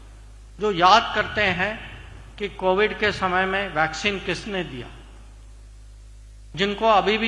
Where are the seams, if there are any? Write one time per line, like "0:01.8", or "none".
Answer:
none